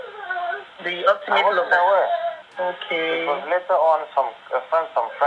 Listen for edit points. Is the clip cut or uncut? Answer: cut